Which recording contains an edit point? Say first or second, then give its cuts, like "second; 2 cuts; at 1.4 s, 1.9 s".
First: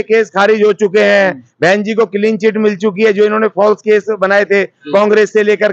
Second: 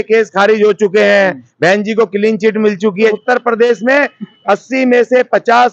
second; 1 cut; at 3.1 s